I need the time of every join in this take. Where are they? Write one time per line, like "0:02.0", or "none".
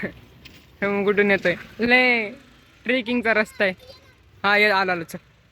none